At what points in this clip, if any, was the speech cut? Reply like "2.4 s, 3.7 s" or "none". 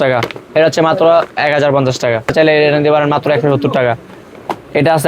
2.3 s